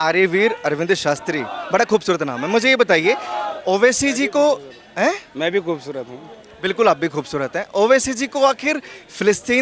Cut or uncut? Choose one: uncut